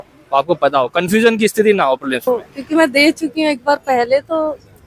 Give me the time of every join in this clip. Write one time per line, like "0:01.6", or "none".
0:02.3